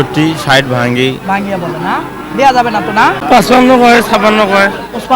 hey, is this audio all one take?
no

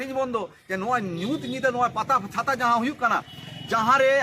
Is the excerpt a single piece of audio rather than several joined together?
yes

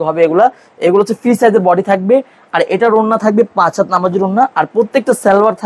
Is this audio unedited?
yes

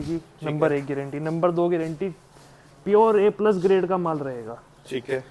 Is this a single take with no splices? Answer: yes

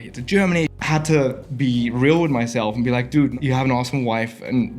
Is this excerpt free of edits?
no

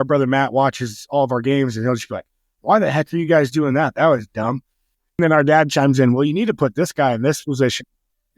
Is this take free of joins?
no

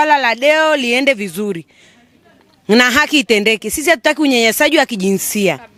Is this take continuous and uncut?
yes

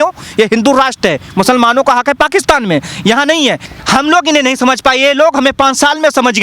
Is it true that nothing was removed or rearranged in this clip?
no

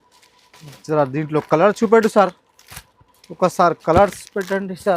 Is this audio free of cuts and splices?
no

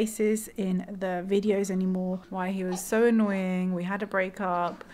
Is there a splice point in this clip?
yes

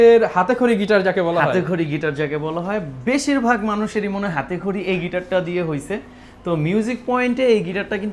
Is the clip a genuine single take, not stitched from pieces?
yes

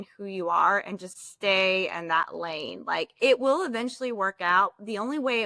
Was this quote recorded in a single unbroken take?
yes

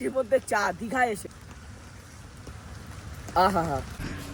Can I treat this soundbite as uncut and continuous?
yes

